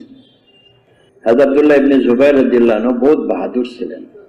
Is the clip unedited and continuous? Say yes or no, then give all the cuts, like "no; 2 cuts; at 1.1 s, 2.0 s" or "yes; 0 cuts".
no; 1 cut; at 1.4 s